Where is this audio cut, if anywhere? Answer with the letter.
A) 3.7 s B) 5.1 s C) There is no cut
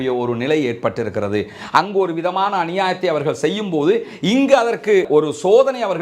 B